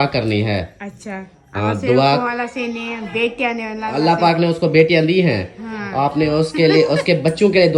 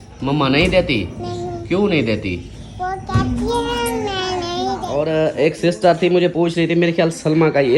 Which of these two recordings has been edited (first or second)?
second